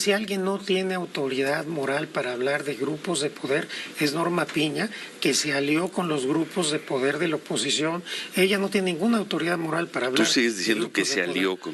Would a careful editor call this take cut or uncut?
uncut